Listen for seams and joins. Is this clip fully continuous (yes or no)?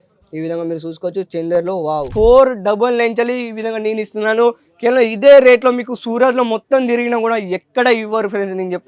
no